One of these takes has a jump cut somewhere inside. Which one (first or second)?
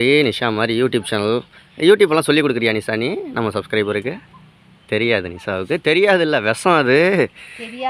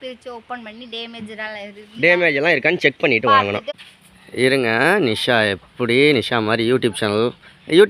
second